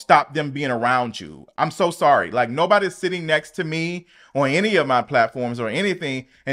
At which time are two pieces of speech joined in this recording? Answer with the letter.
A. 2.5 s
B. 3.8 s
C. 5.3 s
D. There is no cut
D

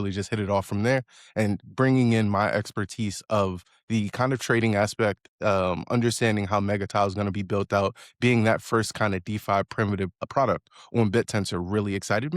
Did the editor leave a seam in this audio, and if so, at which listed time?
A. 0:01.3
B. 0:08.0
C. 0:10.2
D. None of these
C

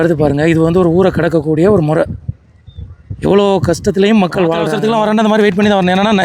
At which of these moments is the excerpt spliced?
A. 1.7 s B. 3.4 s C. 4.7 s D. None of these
C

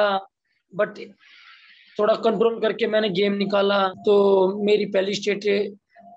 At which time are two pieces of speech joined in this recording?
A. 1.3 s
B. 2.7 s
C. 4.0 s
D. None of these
C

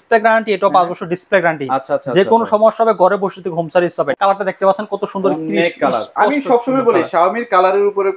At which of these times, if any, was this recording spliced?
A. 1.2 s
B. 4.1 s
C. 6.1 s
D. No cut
B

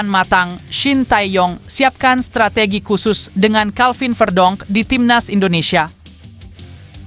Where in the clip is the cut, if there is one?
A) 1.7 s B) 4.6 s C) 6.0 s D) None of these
C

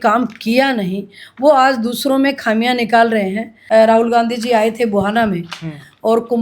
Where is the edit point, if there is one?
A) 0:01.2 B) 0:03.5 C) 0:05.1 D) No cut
B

